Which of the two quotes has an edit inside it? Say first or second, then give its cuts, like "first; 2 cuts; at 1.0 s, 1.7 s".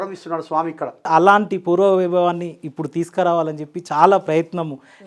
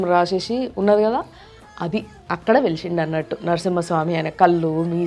first; 1 cut; at 1.1 s